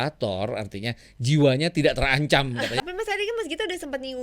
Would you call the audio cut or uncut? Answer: cut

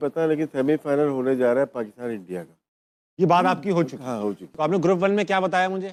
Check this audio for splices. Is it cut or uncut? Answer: uncut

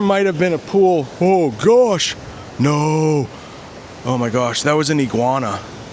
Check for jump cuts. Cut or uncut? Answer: uncut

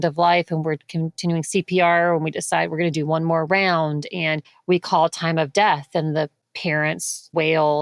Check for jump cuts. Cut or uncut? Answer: uncut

